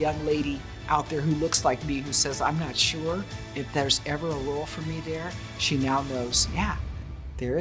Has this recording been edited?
no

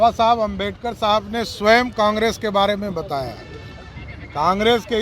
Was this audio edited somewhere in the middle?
no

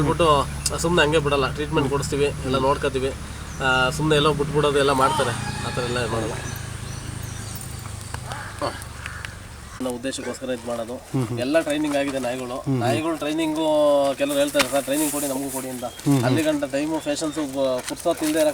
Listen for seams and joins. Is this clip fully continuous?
no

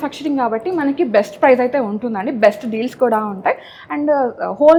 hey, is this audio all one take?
yes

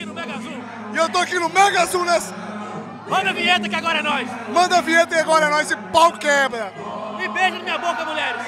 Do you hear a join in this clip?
no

